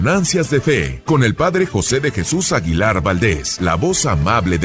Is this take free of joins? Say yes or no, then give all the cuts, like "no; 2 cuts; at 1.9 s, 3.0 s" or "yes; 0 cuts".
no; 2 cuts; at 0.9 s, 3.5 s